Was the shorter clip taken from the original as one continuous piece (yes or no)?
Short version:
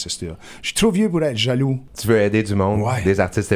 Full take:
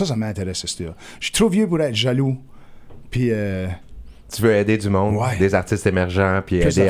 no